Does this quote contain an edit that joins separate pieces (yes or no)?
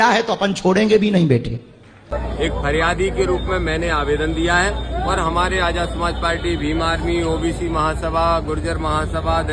yes